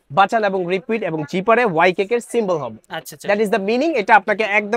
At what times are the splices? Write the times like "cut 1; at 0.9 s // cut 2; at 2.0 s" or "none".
none